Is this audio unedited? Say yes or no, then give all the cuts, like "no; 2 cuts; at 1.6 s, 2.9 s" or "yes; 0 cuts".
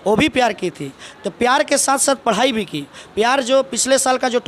yes; 0 cuts